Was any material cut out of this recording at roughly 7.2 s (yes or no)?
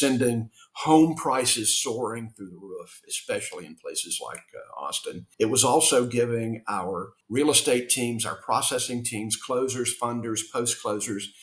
yes